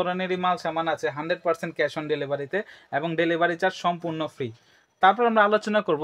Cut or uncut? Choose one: uncut